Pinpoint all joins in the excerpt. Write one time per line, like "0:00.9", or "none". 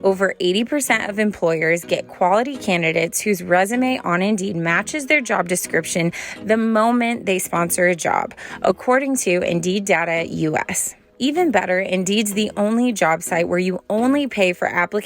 0:11.0